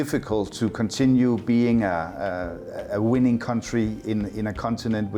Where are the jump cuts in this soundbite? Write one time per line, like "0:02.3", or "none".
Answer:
none